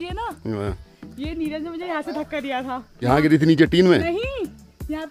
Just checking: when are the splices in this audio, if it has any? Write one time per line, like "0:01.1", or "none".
0:03.1